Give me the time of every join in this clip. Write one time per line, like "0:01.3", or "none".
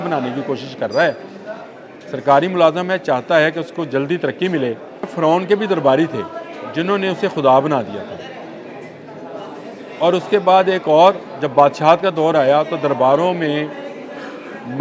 0:05.1

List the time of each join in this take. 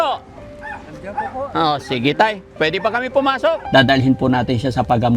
0:03.6

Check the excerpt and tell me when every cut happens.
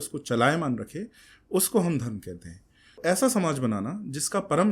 0:03.0

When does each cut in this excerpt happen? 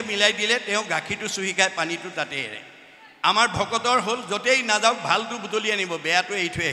none

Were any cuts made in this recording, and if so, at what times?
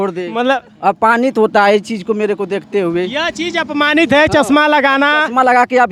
none

